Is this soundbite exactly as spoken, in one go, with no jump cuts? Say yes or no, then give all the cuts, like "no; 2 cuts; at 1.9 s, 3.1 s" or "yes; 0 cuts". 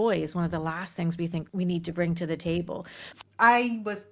no; 2 cuts; at 1.5 s, 3.0 s